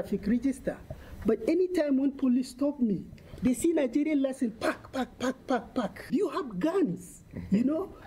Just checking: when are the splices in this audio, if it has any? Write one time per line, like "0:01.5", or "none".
0:06.0